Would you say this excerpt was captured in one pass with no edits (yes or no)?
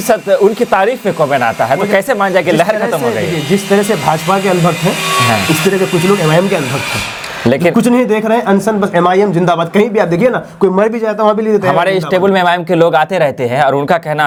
yes